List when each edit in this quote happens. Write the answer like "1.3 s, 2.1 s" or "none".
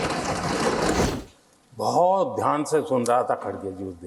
1.0 s